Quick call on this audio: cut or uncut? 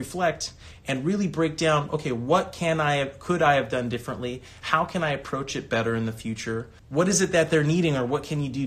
cut